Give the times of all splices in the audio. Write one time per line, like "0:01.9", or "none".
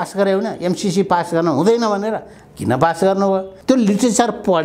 0:03.5